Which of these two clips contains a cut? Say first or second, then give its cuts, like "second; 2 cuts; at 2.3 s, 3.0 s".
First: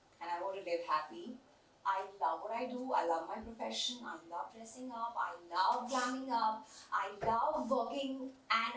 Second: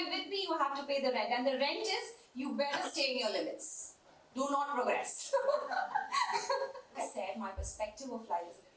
second; 1 cut; at 7.0 s